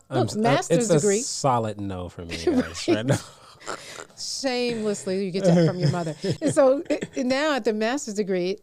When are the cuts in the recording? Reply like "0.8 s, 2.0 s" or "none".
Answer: none